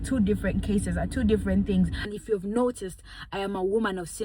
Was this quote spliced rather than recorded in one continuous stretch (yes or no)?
yes